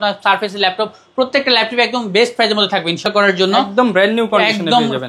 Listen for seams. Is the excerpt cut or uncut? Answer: cut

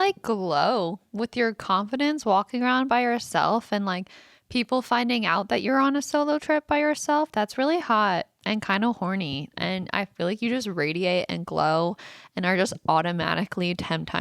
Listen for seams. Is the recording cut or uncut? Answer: uncut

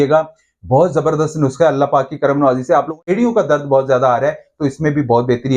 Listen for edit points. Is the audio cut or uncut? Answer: cut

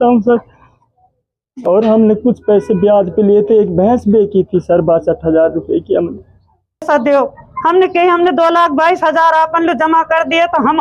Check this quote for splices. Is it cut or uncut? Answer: cut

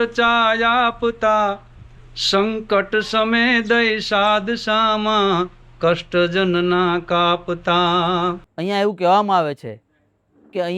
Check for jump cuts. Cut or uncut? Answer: cut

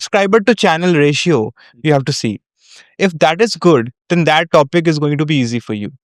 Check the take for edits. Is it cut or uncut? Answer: uncut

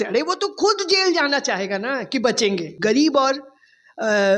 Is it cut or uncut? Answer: cut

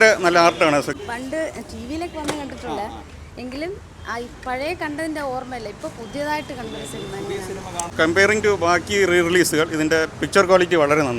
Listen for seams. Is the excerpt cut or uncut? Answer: cut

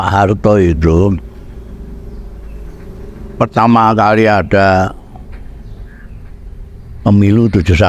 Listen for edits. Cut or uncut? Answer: uncut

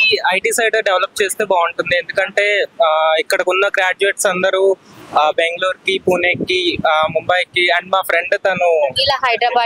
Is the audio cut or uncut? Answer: uncut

